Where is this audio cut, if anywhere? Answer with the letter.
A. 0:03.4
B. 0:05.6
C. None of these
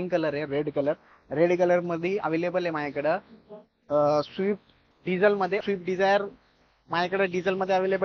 B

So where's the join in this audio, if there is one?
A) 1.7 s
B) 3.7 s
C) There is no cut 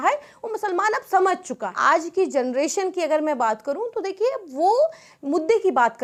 C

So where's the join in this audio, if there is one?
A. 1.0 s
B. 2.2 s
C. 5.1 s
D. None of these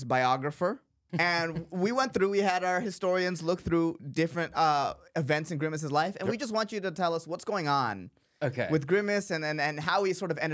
A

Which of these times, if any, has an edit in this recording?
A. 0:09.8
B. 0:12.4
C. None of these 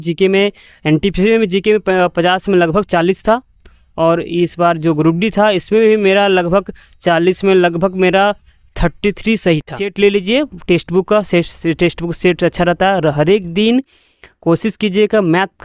A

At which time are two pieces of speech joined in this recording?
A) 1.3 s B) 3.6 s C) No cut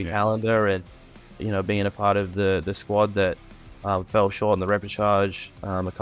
C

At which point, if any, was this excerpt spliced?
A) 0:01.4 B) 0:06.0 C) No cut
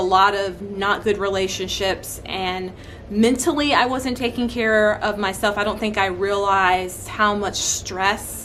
C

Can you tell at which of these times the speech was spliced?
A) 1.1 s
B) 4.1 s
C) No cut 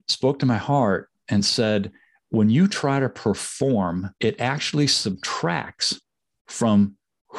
B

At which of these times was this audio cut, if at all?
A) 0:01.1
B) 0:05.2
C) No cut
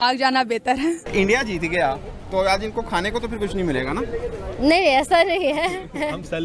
A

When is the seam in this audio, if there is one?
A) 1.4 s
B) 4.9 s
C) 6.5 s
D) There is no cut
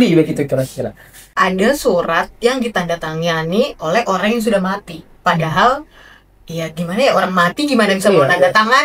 A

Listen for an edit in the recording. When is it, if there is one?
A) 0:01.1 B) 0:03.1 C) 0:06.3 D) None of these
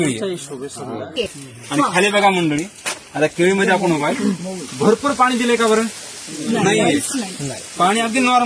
A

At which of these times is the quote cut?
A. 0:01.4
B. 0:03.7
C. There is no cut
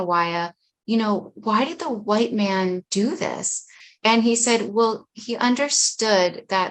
B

